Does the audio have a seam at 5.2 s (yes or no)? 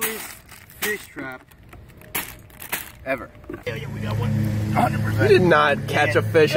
no